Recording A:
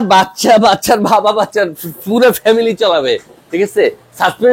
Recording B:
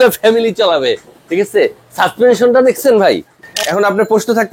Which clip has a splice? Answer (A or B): B